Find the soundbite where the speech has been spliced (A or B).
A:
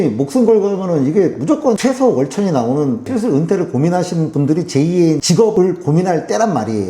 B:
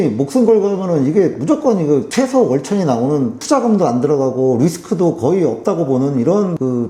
A